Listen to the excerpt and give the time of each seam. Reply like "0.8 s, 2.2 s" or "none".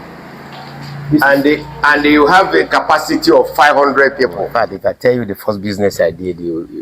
4.4 s